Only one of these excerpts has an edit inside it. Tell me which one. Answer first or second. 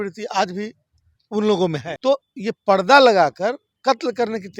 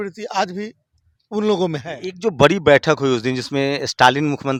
first